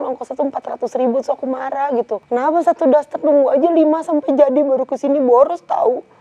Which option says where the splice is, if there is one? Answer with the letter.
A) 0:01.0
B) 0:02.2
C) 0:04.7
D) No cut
B